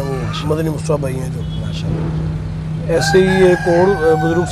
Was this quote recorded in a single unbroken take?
yes; 0 cuts

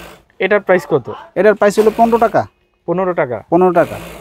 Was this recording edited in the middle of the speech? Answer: no; 0 cuts

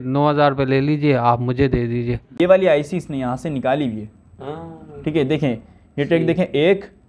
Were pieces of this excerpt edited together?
yes; 1 cut; at 2.4 s

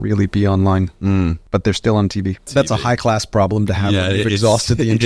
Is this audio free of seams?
no; 2 cuts; at 1.4 s, 2.5 s

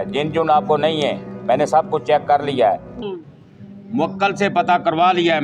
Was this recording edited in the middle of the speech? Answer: yes; 1 cut; at 3.1 s

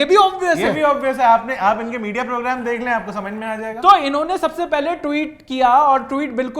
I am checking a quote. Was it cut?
no; 0 cuts

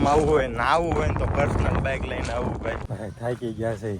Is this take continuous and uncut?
no; 1 cut; at 2.9 s

